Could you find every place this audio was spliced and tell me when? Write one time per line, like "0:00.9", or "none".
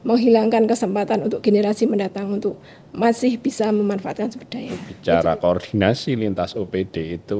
0:04.8